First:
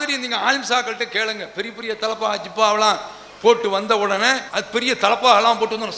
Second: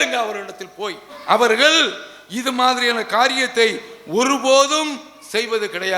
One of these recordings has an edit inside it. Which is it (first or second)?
second